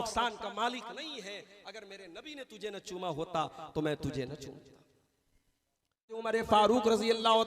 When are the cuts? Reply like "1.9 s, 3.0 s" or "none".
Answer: 6.2 s